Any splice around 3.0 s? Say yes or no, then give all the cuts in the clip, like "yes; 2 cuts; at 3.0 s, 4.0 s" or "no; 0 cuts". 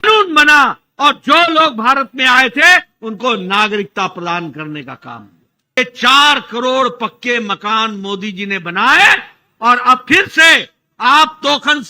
no; 1 cut; at 5.7 s